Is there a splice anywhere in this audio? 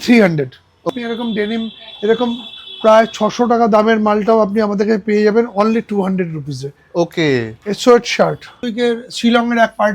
yes; 2 cuts; at 0.9 s, 8.6 s

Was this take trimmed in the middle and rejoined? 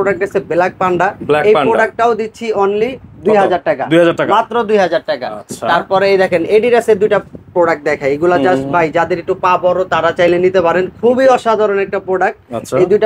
no; 0 cuts

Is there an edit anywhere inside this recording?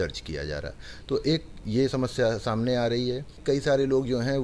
yes; 1 cut; at 3.3 s

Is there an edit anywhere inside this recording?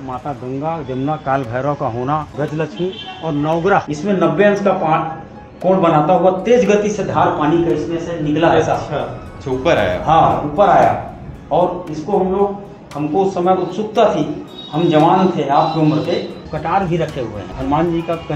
yes; 4 cuts; at 2.3 s, 3.9 s, 16.4 s, 17.4 s

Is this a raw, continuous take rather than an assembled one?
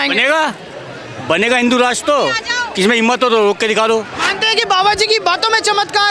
no; 1 cut; at 4.1 s

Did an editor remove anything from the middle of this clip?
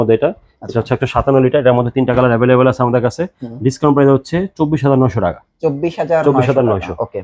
no; 0 cuts

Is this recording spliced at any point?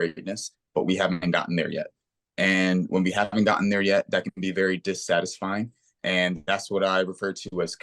no; 0 cuts

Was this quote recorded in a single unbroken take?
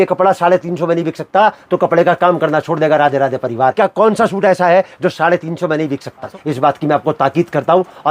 no; 2 cuts; at 3.7 s, 6.4 s

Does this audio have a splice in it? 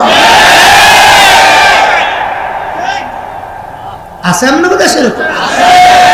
no; 0 cuts

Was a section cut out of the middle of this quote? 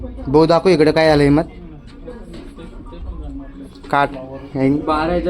no; 0 cuts

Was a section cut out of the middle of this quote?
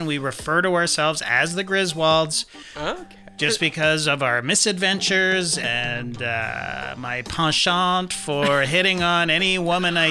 yes; 1 cut; at 5.7 s

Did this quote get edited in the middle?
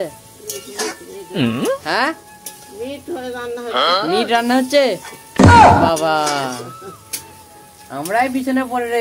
no; 0 cuts

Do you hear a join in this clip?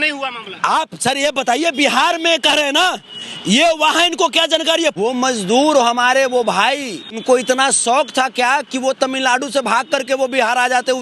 yes; 2 cuts; at 5.0 s, 7.2 s

